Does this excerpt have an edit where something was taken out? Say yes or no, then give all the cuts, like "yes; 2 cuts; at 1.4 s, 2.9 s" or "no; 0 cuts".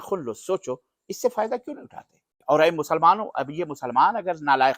yes; 1 cut; at 2.3 s